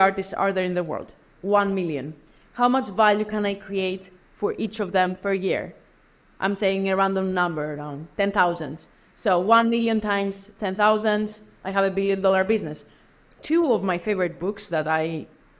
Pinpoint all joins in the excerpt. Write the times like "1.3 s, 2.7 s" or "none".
13.3 s